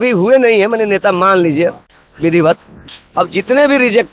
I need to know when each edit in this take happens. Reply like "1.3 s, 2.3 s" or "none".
none